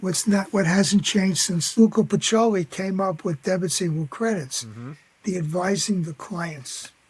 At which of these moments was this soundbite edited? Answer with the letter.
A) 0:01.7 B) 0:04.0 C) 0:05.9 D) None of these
A